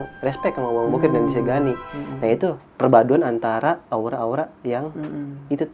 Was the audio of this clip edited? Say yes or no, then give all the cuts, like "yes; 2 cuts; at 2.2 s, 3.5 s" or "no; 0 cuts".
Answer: no; 0 cuts